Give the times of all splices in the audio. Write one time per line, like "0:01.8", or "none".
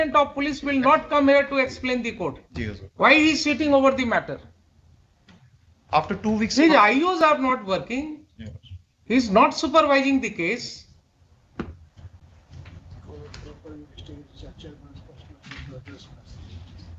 none